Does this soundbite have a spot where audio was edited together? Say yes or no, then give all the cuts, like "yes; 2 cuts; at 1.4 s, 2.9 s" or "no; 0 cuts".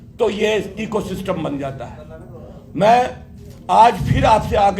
no; 0 cuts